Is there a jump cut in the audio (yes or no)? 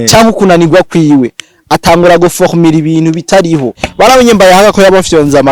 yes